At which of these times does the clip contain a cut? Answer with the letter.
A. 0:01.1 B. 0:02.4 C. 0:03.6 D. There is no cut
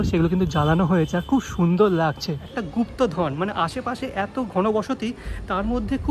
B